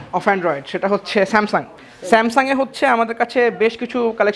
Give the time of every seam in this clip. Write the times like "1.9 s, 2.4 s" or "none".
none